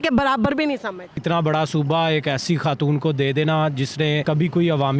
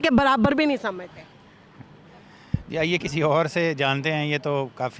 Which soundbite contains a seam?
first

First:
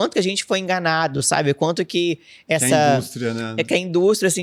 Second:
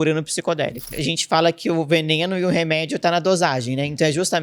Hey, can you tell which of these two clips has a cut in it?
second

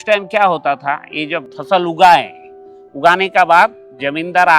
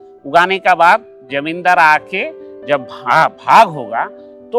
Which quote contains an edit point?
first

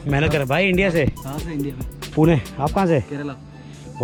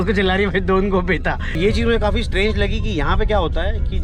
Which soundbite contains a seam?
second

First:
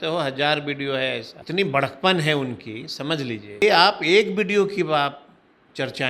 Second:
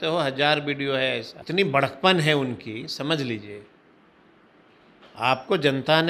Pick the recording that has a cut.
first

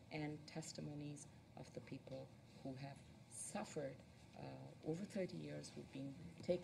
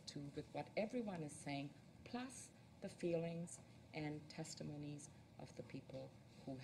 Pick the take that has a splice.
second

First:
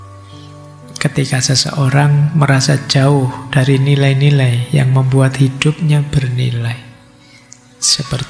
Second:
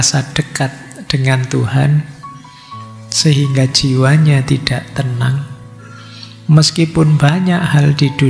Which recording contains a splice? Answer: first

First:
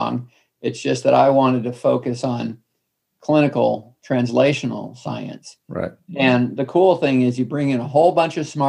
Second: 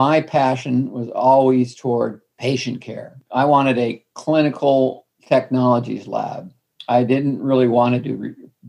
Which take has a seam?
second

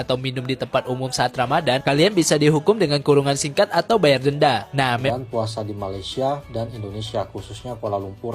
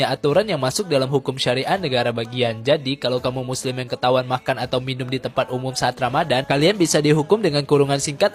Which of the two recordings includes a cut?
first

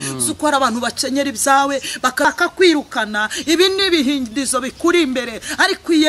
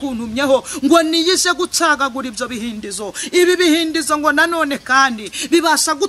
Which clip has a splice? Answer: first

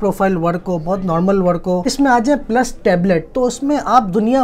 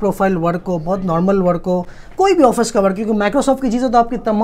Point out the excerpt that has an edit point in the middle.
first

